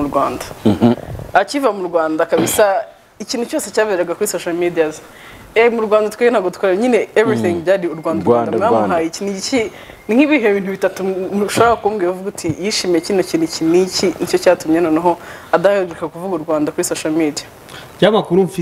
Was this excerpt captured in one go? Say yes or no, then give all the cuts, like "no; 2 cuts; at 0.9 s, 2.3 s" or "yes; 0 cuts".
yes; 0 cuts